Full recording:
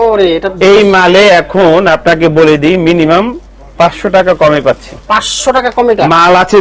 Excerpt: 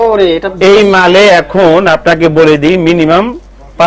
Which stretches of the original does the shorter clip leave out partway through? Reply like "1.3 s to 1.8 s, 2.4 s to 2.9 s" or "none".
none